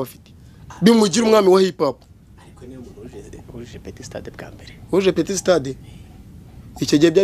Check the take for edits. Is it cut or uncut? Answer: uncut